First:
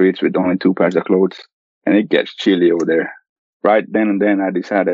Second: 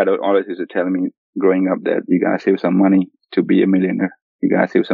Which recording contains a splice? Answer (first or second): first